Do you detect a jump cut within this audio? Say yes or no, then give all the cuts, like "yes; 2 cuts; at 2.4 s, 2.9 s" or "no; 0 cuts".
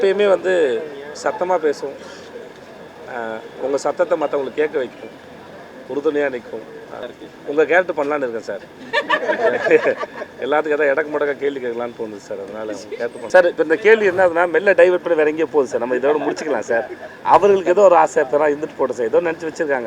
yes; 2 cuts; at 7.1 s, 13.2 s